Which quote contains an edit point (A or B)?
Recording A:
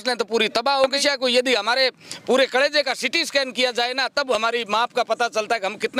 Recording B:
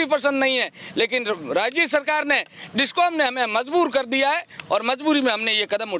A